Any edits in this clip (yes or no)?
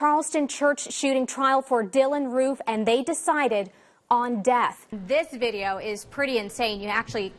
yes